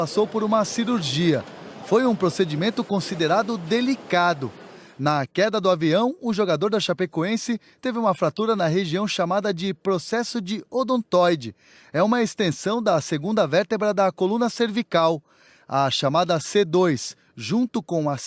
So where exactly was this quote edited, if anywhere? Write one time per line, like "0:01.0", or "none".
0:04.0